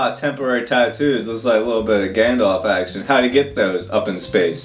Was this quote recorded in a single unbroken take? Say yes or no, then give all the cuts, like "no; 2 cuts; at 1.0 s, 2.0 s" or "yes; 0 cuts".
yes; 0 cuts